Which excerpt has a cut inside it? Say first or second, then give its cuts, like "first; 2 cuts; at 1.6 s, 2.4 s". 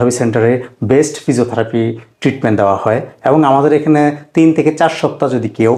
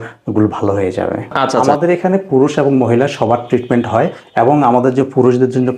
second; 1 cut; at 1.6 s